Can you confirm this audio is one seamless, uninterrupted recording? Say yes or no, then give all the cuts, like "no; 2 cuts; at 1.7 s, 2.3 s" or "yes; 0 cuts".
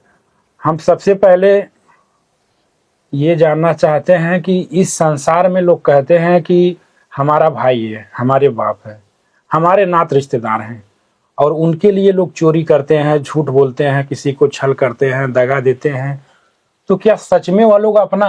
yes; 0 cuts